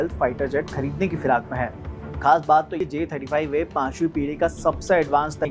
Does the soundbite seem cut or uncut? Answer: uncut